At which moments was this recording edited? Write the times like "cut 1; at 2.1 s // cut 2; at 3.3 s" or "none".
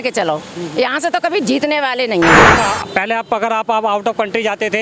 cut 1; at 2.6 s

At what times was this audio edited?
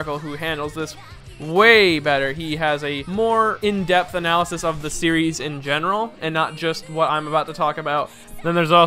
none

